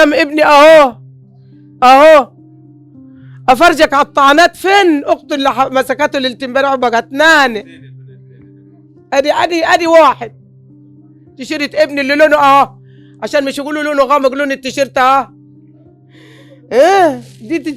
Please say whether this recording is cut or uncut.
cut